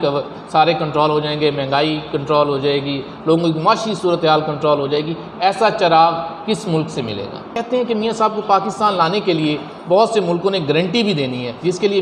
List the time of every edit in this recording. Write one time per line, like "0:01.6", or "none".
0:07.5